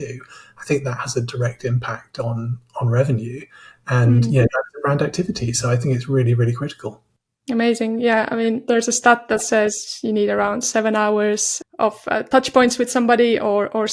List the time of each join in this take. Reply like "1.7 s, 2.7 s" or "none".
none

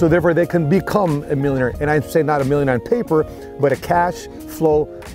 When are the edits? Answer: none

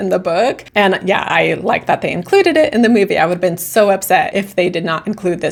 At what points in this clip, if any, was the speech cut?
none

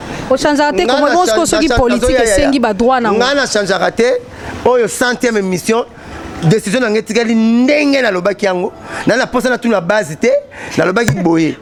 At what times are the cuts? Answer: none

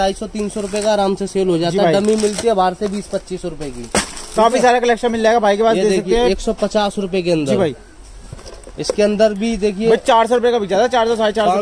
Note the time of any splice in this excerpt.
none

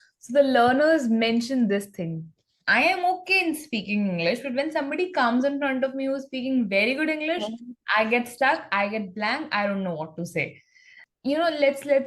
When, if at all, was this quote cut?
11.0 s

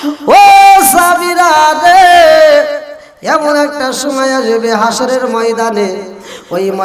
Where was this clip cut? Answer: none

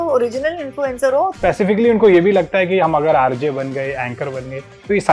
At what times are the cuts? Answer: 1.3 s

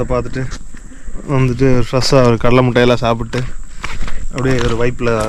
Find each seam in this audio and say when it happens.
none

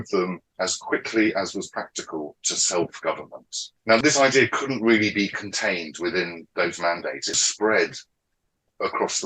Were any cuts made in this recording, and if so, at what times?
3.9 s, 7.4 s

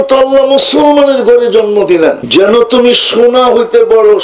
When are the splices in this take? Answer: 2.2 s

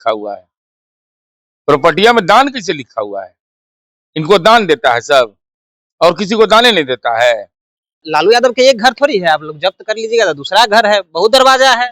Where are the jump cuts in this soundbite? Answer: 8.0 s

